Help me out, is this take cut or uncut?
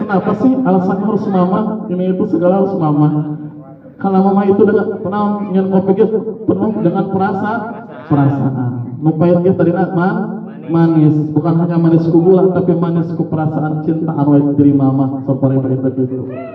uncut